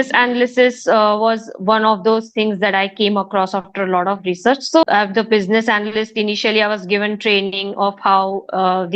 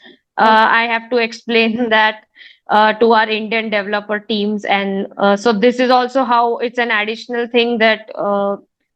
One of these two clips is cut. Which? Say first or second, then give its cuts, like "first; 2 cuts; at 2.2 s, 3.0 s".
first; 1 cut; at 4.8 s